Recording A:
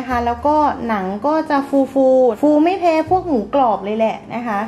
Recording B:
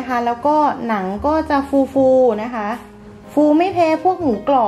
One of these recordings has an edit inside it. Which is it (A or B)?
A